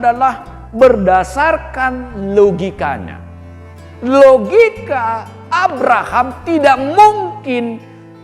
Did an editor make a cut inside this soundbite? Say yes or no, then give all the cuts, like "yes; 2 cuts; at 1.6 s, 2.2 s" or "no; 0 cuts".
no; 0 cuts